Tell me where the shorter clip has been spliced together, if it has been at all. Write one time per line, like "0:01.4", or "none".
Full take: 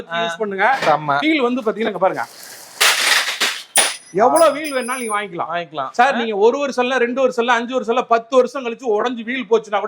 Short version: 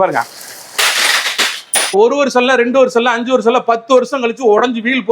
0:01.9